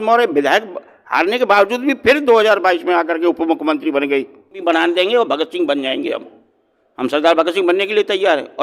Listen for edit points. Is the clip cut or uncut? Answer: cut